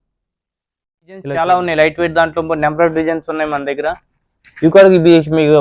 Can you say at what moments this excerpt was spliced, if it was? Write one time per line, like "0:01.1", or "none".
0:01.3